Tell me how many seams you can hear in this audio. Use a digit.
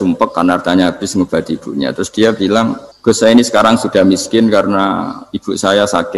1